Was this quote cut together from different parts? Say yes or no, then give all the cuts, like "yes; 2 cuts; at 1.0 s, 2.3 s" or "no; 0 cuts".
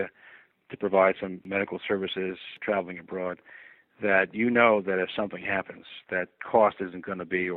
yes; 3 cuts; at 1.4 s, 2.5 s, 6.4 s